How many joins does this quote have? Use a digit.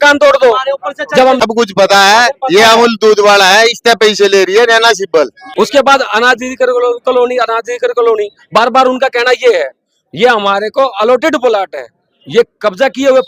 2